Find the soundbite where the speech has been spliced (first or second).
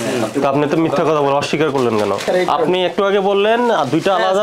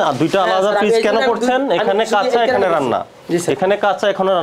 first